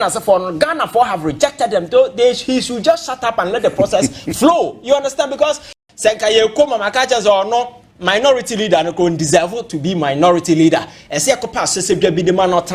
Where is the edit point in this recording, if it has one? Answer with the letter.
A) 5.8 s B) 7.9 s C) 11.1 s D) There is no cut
A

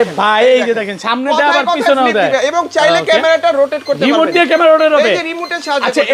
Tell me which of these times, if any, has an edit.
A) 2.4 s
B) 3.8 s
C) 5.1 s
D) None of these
D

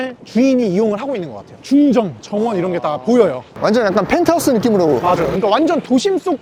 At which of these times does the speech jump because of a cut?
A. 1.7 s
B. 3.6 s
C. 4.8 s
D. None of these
D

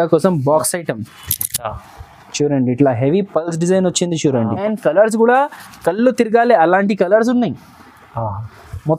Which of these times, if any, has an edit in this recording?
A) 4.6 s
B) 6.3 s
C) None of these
A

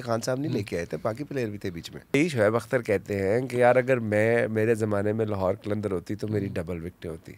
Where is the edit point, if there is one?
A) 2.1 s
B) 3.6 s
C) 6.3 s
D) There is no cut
A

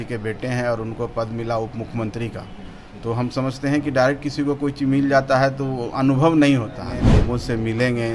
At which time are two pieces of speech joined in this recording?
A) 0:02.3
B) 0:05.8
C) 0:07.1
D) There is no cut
C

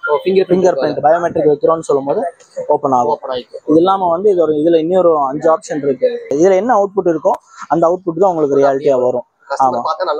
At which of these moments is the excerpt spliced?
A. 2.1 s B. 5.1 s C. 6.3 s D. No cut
C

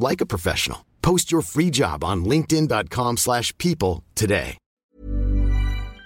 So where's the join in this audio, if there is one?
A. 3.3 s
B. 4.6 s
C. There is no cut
B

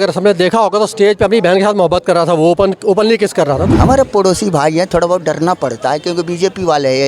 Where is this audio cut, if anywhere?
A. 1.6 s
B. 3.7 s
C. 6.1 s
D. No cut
B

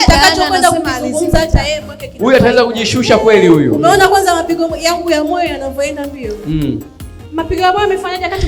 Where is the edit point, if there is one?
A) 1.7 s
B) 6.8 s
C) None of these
C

